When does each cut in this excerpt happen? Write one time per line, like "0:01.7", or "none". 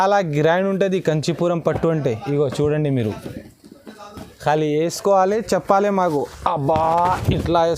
none